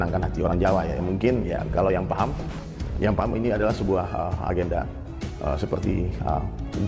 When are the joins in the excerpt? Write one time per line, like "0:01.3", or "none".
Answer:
none